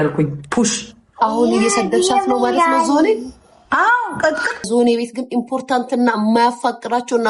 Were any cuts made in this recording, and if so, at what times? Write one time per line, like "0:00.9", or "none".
0:04.7